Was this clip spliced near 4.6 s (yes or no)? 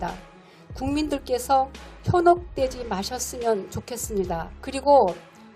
yes